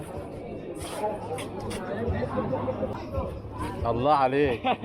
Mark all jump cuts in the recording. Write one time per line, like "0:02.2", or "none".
0:02.9

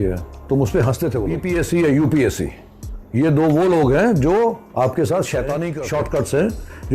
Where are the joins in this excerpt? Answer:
0:01.4
0:05.7

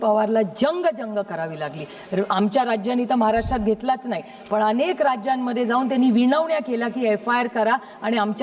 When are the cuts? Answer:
none

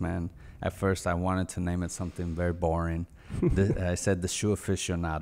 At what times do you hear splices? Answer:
none

